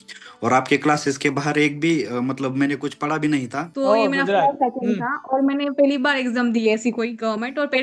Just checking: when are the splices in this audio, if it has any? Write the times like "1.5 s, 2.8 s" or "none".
3.6 s